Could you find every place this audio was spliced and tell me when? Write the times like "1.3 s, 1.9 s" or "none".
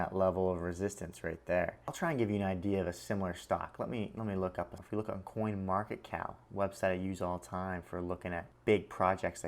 2.0 s, 4.8 s, 8.5 s